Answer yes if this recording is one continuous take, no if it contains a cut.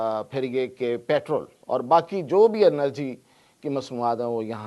no